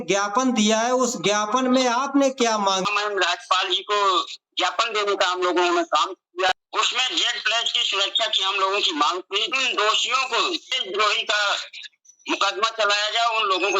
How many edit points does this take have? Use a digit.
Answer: 4